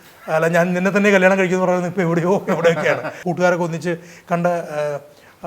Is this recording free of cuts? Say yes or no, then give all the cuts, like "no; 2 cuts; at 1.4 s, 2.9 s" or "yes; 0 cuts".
no; 1 cut; at 3.2 s